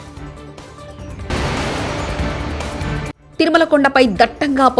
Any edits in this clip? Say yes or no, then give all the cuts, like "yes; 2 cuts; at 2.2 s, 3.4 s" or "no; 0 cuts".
yes; 1 cut; at 0.9 s